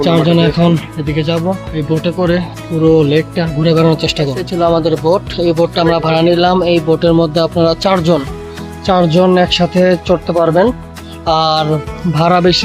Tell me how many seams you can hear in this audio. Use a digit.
1